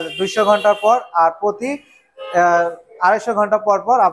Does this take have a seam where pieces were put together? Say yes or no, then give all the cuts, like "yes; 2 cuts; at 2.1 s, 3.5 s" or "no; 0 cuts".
no; 0 cuts